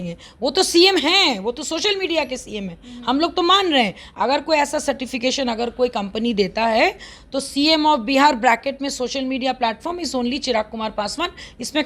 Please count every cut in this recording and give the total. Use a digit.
0